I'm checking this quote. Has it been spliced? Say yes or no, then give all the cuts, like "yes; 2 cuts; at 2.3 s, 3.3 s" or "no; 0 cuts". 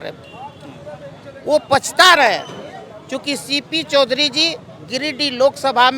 no; 0 cuts